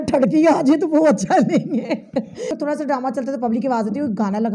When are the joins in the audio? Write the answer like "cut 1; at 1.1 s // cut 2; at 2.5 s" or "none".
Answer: cut 1; at 2.5 s